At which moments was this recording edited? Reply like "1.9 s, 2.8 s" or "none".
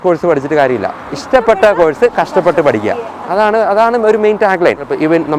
none